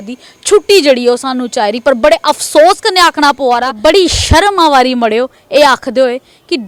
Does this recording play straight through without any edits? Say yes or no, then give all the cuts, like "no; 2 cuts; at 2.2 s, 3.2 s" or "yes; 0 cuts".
yes; 0 cuts